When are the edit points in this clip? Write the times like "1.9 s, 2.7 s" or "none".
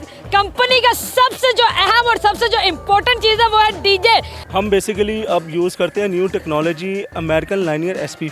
4.4 s